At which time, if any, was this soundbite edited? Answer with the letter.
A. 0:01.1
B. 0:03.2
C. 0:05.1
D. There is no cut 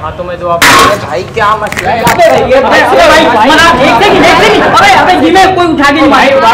D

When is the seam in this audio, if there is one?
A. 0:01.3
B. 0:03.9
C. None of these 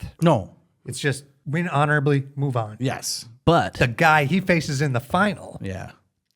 A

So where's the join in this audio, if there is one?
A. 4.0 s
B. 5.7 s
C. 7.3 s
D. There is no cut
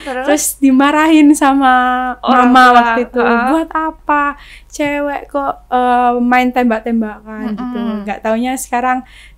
D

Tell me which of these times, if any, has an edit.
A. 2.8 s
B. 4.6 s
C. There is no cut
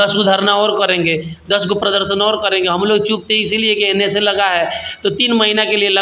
C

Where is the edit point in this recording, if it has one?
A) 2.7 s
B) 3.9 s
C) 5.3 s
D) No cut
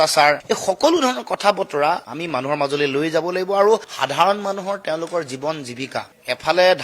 D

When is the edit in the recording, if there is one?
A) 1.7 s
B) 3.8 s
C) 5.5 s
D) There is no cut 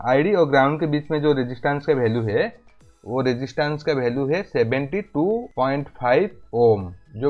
C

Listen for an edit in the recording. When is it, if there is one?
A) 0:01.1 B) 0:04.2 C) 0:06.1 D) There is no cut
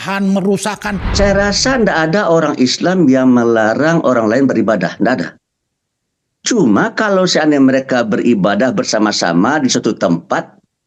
A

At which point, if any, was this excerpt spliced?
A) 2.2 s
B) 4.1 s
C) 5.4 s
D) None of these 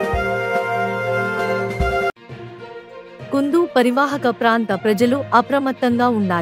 A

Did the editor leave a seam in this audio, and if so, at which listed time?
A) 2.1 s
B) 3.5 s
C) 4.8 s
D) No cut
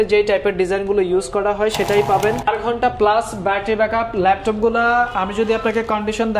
A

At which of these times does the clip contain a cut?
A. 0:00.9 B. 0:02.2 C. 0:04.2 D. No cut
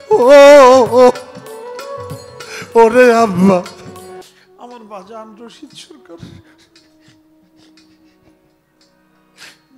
C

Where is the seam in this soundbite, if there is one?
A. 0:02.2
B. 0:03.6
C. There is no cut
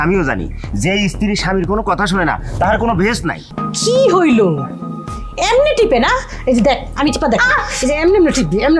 B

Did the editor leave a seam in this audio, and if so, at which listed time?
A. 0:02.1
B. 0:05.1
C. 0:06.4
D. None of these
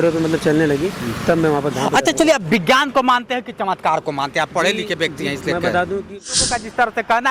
C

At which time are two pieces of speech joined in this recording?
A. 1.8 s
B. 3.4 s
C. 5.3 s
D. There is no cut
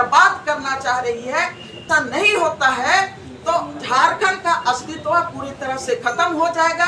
A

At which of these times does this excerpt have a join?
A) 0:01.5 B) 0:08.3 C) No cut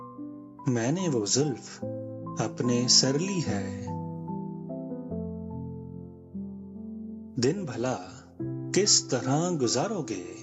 C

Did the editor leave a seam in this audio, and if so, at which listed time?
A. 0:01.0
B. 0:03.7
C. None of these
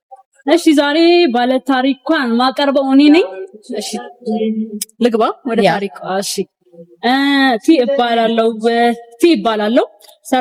C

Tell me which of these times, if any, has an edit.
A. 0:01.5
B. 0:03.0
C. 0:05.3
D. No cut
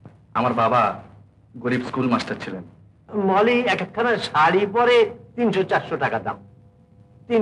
B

